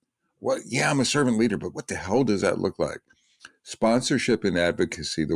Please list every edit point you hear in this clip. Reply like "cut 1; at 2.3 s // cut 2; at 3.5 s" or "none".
none